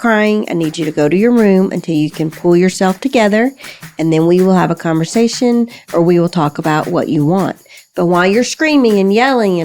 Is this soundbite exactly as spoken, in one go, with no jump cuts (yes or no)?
yes